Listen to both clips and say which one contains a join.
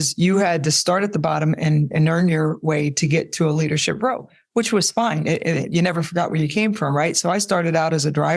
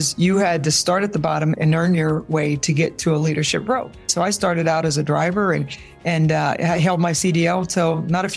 second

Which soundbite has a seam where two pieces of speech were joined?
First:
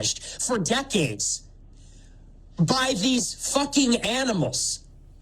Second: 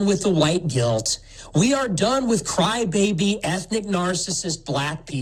first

